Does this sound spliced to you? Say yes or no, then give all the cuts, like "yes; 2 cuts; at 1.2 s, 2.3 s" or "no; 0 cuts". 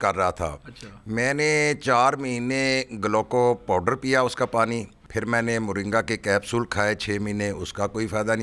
yes; 1 cut; at 5.0 s